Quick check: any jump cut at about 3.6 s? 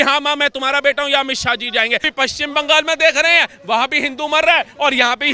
no; 1 cut; at 2.1 s

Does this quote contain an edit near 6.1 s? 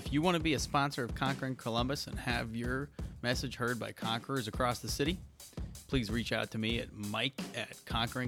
no; 0 cuts

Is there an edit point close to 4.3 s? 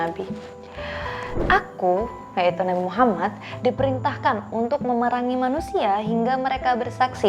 no; 1 cut; at 1.4 s

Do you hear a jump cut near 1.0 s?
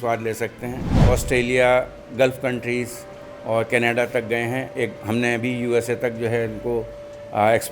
yes; 1 cut; at 1.0 s

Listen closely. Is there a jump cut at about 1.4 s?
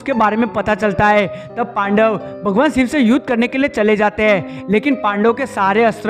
no; 0 cuts

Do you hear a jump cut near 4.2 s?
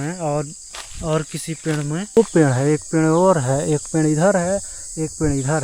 no; 1 cut; at 2.2 s

